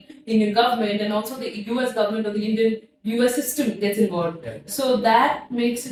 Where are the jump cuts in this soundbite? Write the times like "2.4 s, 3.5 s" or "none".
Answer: none